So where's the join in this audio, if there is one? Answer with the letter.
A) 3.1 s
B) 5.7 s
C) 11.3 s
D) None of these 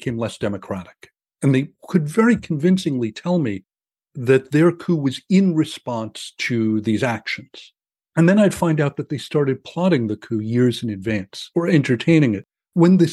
C